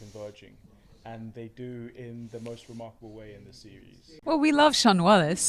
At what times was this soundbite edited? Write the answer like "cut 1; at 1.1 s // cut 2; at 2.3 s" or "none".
cut 1; at 4.2 s